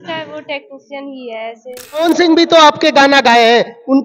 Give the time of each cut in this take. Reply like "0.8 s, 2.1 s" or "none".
2.0 s